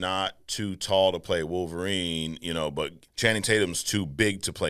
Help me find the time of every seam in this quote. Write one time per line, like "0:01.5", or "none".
0:03.0